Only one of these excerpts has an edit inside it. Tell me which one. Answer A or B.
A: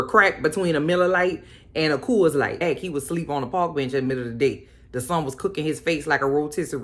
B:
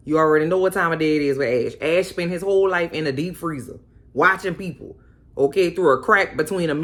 A